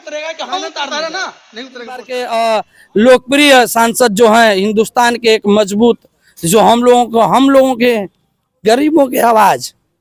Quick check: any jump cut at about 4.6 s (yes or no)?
no